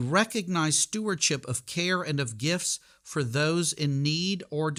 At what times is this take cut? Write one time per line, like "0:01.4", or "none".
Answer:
none